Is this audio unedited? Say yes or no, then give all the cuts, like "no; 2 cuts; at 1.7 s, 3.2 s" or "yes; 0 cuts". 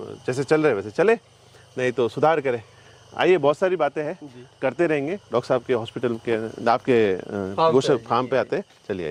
yes; 0 cuts